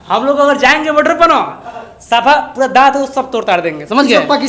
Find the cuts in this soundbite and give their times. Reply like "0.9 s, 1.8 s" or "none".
none